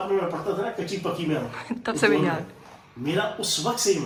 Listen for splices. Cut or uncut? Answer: uncut